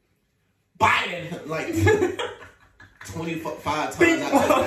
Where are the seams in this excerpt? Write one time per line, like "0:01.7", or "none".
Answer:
none